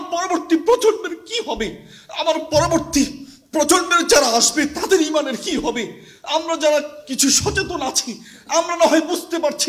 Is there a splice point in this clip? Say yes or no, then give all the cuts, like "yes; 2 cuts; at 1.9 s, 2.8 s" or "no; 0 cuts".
no; 0 cuts